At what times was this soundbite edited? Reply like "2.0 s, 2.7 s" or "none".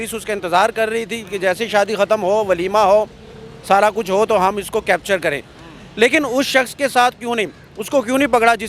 none